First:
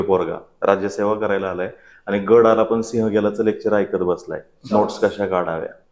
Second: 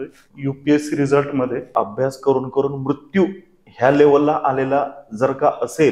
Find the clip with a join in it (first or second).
second